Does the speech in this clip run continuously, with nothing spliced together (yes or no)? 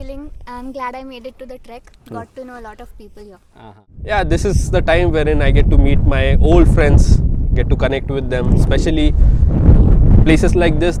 yes